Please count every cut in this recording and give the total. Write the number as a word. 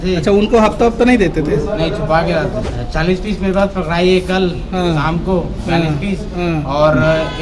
one